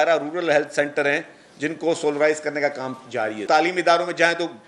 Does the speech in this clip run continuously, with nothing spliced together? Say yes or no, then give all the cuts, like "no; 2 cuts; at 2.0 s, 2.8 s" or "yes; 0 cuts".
no; 1 cut; at 3.4 s